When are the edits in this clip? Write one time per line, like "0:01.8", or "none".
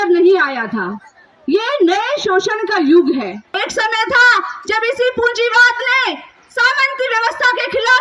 0:03.5